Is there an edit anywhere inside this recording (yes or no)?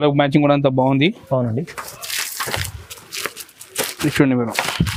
no